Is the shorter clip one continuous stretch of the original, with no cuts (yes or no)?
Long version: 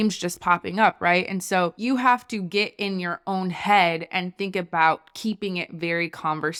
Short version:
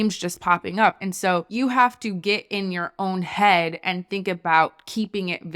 no